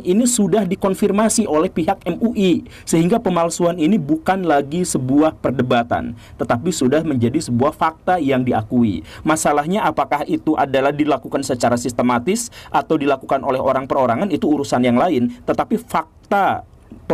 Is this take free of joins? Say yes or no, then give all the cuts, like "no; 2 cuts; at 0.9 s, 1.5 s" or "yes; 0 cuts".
yes; 0 cuts